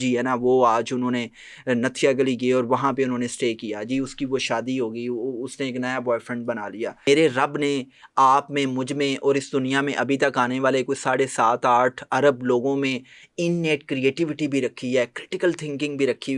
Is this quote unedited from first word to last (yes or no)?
no